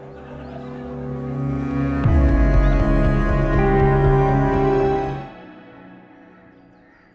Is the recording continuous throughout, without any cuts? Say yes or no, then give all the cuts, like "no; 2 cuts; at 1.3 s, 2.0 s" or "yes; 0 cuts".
no; 1 cut; at 5.1 s